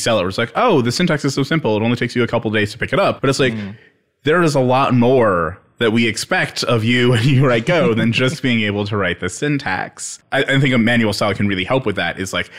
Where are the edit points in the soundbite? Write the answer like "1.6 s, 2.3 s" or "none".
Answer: 3.2 s, 10.2 s